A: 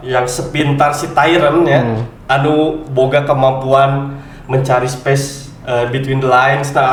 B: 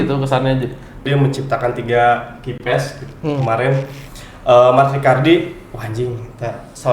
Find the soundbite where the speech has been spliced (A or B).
B